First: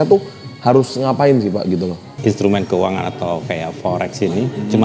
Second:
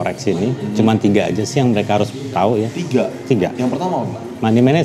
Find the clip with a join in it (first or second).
first